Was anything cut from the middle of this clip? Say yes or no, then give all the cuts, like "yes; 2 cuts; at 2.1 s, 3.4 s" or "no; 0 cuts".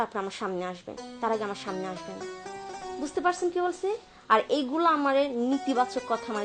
no; 0 cuts